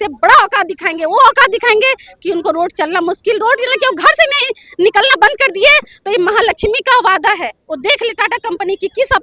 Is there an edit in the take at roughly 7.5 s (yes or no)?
no